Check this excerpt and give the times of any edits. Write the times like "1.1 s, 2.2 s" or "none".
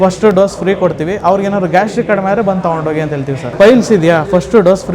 3.5 s